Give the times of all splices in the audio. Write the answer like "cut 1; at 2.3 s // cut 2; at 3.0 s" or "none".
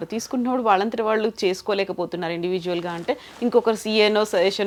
none